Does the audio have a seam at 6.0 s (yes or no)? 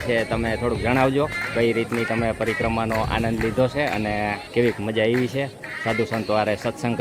no